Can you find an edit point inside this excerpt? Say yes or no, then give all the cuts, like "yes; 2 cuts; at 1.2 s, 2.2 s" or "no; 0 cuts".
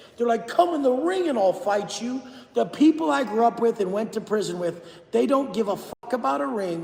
no; 0 cuts